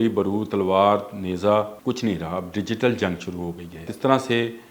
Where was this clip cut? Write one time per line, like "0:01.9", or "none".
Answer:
0:01.7
0:03.9